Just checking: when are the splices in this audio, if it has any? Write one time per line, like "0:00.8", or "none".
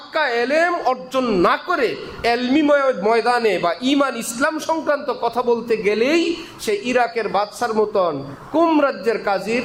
none